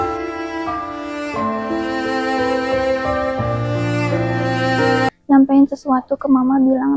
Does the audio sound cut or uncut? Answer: cut